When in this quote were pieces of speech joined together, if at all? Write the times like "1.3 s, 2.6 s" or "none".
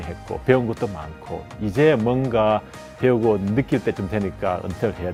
none